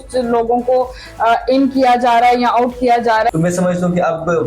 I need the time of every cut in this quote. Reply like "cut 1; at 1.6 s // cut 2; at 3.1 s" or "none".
cut 1; at 3.3 s